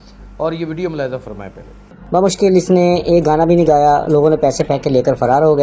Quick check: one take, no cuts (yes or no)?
no